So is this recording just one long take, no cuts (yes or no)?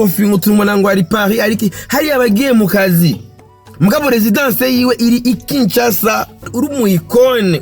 no